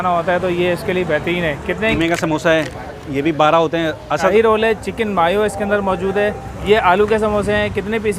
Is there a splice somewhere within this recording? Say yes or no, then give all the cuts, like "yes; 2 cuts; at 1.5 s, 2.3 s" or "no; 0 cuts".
yes; 3 cuts; at 1.9 s, 4.3 s, 6.5 s